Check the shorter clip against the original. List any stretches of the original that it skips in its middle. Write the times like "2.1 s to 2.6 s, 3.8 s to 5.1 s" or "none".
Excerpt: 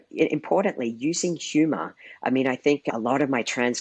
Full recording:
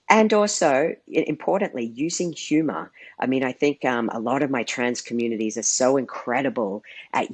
3.8 s to 4.1 s